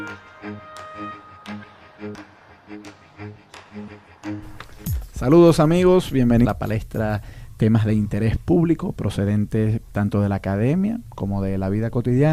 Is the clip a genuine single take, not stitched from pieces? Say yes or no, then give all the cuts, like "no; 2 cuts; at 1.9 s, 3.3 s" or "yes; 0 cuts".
yes; 0 cuts